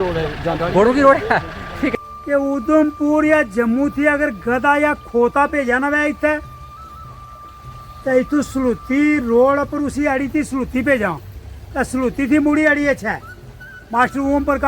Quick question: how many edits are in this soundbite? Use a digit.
1